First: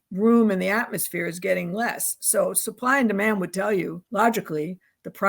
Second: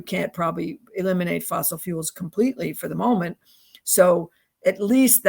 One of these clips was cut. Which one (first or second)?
first